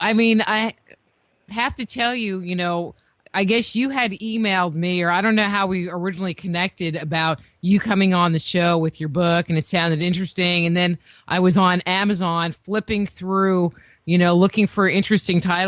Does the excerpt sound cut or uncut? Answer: uncut